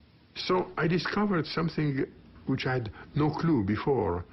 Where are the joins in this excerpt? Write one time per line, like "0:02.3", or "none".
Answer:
0:02.8